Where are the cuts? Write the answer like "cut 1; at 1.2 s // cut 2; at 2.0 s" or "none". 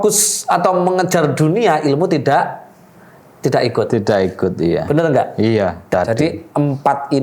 cut 1; at 5.9 s